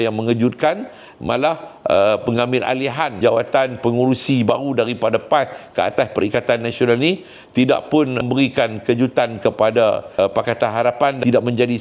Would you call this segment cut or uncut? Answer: uncut